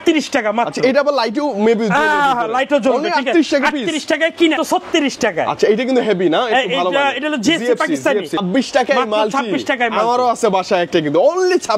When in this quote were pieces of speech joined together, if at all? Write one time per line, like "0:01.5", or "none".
0:04.6
0:08.4